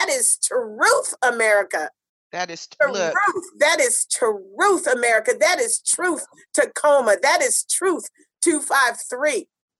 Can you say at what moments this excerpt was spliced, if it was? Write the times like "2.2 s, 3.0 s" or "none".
none